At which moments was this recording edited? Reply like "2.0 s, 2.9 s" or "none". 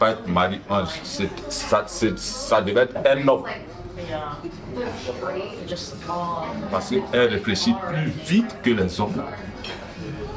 none